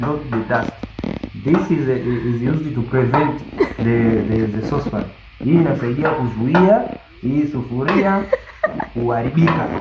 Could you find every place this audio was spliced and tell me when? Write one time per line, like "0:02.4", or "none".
none